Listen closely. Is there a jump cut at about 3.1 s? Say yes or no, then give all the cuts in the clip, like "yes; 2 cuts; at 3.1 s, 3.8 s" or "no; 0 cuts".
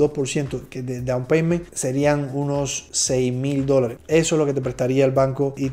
no; 0 cuts